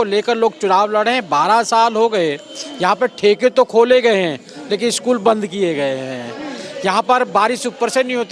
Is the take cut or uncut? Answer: uncut